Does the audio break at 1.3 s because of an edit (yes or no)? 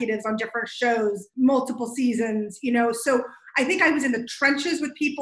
yes